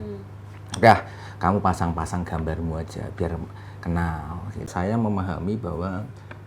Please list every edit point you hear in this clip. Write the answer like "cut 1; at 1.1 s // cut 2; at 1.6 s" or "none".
cut 1; at 4.7 s